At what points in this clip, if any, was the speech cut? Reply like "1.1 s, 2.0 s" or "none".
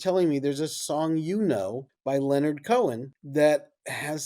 1.9 s, 3.1 s